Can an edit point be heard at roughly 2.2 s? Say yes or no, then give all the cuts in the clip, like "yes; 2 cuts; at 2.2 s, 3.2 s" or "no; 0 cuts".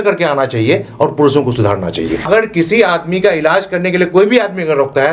yes; 1 cut; at 2.2 s